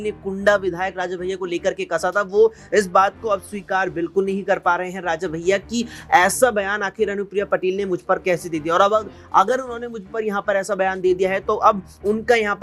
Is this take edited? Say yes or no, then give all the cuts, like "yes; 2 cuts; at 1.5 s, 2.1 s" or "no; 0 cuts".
no; 0 cuts